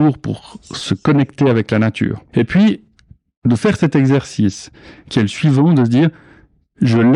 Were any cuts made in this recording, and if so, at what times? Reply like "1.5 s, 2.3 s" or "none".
2.2 s